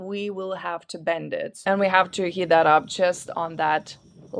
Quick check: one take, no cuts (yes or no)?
no